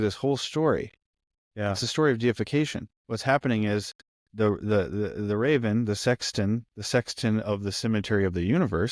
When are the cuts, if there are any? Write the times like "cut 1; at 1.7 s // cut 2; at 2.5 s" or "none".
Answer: none